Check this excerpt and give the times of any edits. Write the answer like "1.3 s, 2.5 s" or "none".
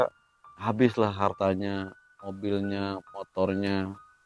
none